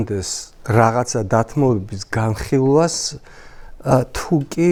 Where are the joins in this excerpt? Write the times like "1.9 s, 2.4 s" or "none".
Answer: none